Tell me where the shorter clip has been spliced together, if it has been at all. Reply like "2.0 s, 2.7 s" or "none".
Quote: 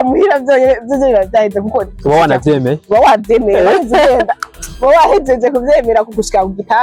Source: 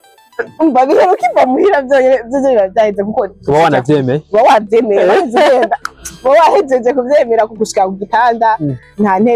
none